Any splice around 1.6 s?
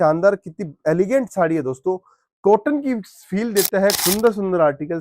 no; 1 cut; at 4.0 s

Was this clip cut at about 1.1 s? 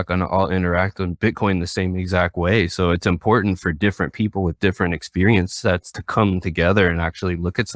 yes; 1 cut; at 1.1 s

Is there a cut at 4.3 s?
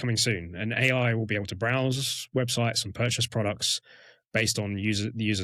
no; 0 cuts

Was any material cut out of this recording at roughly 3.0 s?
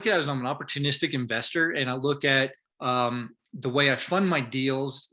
yes; 1 cut; at 3.0 s

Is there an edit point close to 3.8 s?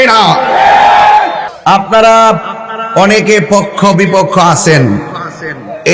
no; 1 cut; at 1.9 s

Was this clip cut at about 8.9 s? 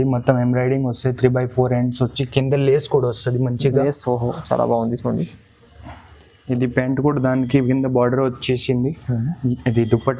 no; 0 cuts

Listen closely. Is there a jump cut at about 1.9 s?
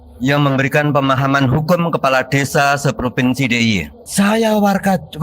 no; 1 cut; at 4.0 s

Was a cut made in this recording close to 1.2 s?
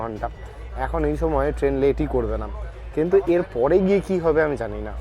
no; 0 cuts

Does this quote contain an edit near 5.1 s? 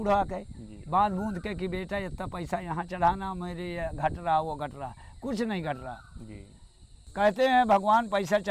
no; 1 cut; at 7.0 s

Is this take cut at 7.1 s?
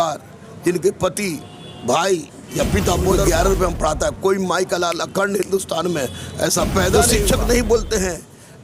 yes; 2 cuts; at 3.2 s, 7.1 s

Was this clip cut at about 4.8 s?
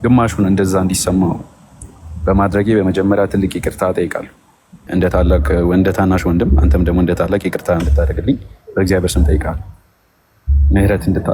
yes; 1 cut; at 4.8 s

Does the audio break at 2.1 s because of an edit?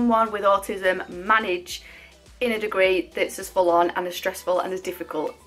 no; 0 cuts

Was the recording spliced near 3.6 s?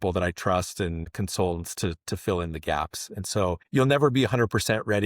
yes; 2 cuts; at 1.1 s, 3.6 s

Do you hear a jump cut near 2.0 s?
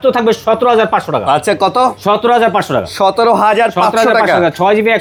no; 0 cuts

